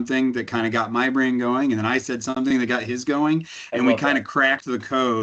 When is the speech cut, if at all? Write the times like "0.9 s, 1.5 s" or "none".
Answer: none